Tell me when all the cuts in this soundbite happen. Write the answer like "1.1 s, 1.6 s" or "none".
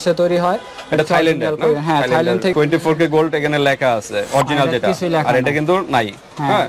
2.5 s